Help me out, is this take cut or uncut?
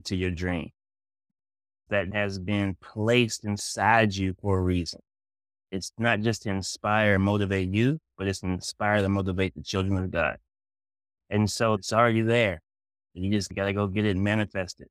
cut